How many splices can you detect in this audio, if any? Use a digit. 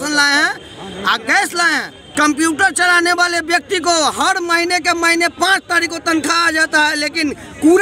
1